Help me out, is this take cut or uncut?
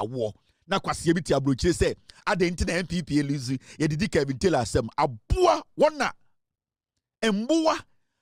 uncut